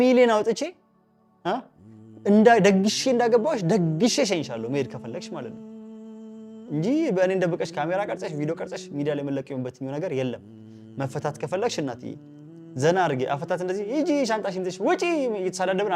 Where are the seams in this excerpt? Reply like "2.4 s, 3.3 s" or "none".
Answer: none